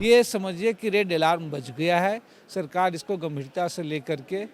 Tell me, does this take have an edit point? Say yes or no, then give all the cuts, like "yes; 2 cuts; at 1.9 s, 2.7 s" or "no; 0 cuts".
no; 0 cuts